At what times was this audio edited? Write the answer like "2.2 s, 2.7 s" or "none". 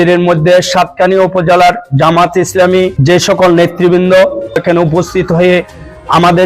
3.0 s, 4.6 s